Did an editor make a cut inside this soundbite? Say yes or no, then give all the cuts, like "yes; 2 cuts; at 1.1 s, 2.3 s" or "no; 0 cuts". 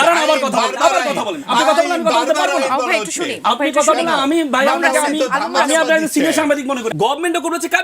yes; 1 cut; at 6.8 s